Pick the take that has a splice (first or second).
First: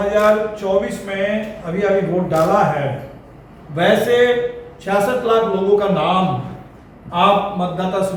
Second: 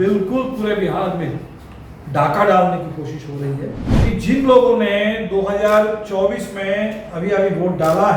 second